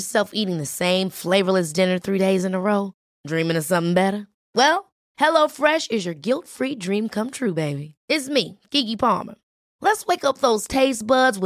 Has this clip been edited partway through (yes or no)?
no